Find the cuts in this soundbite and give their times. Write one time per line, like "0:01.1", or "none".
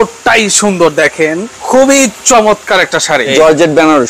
0:01.5
0:03.3